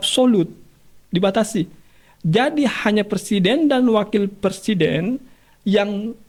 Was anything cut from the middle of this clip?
no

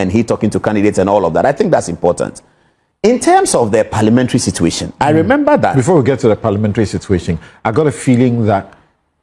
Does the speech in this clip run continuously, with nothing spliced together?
yes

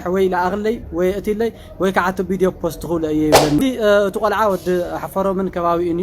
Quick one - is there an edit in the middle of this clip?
yes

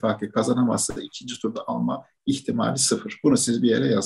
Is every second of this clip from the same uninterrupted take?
yes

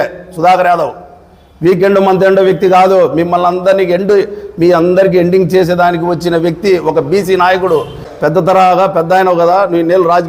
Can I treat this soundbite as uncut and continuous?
no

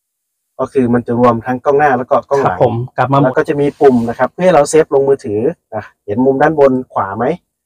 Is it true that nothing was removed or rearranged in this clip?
no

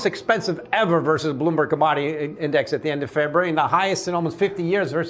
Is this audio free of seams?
yes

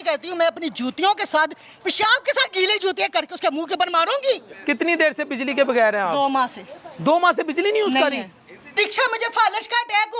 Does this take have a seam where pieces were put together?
yes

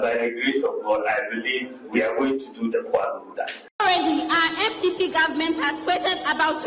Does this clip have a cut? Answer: yes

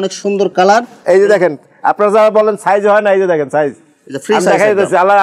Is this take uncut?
yes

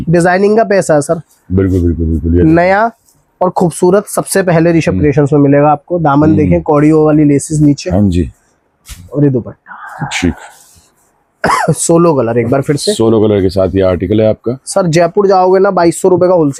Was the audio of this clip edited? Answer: no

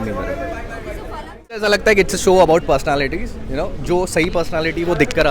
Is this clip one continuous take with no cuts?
no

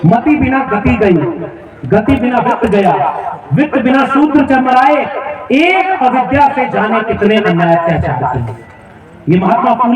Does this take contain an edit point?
no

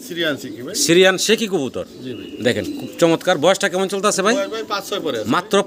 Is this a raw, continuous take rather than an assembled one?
yes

